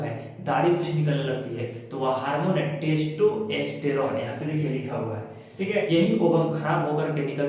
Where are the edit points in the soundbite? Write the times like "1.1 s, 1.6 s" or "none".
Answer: 5.9 s